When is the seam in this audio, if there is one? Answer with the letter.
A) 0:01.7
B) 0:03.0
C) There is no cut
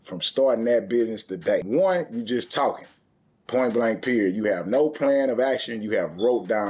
A